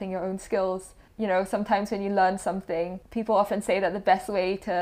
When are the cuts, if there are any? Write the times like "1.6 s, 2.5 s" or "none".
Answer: 1.0 s, 3.0 s